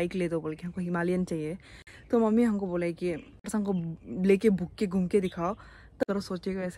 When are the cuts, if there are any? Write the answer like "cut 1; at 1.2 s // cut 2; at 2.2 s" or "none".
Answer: cut 1; at 3.4 s // cut 2; at 6.0 s